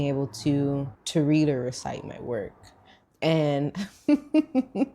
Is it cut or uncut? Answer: cut